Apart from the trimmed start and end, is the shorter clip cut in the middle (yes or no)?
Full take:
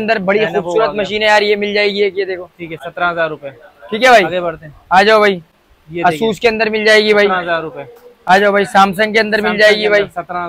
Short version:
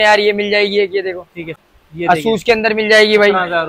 yes